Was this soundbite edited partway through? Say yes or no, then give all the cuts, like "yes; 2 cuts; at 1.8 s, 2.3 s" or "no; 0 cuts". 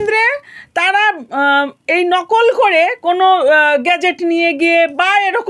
no; 0 cuts